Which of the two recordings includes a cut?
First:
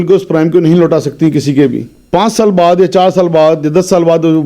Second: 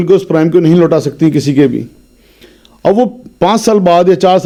first; 1 cut; at 2.0 s

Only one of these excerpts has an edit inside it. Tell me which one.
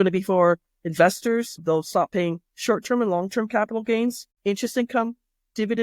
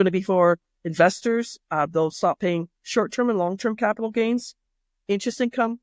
first; 2 cuts; at 1.6 s, 4.3 s

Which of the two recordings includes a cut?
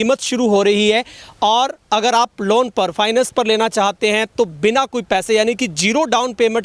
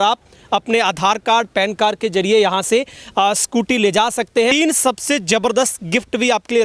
second; 1 cut; at 4.5 s

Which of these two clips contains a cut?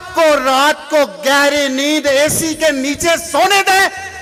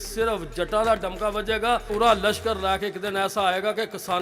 second; 1 cut; at 1.9 s

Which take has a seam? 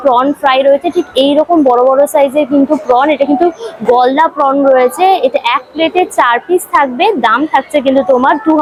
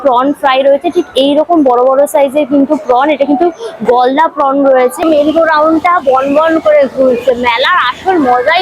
second; 1 cut; at 5.0 s

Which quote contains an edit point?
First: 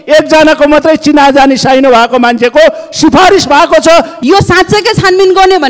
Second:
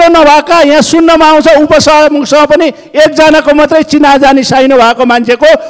first; 1 cut; at 4.1 s

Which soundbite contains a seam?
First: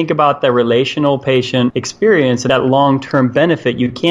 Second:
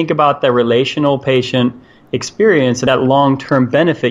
first; 1 cut; at 1.8 s

